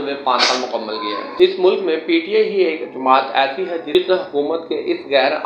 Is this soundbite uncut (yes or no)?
no